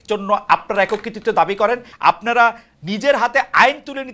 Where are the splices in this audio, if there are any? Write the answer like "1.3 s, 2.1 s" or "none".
1.9 s